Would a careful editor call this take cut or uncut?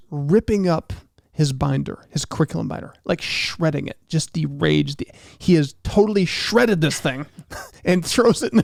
uncut